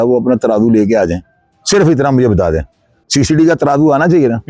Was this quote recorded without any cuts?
yes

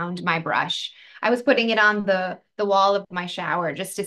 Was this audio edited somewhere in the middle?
no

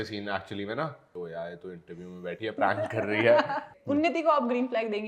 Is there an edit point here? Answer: yes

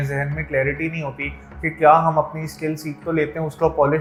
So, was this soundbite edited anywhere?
no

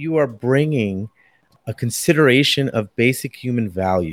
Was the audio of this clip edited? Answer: yes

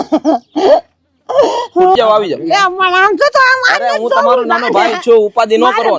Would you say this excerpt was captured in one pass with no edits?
no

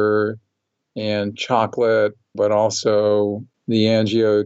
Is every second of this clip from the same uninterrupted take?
no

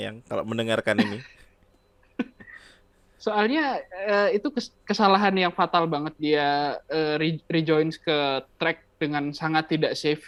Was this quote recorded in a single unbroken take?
yes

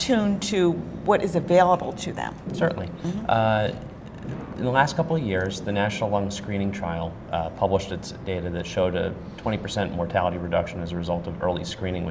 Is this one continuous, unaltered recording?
no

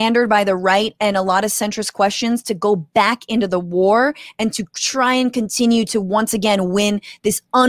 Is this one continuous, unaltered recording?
yes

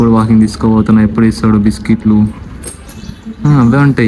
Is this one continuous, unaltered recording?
yes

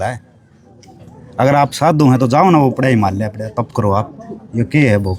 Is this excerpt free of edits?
yes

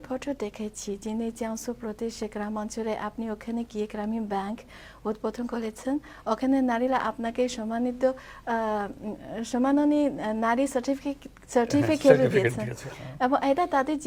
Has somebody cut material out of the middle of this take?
no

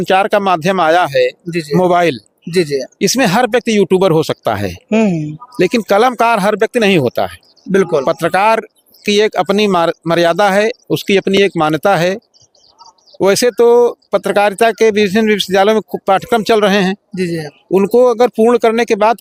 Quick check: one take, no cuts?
yes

